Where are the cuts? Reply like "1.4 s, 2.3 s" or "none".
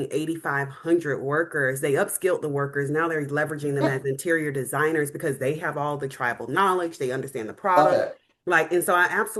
none